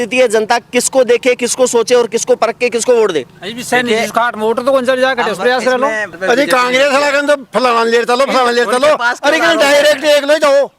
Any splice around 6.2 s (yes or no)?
yes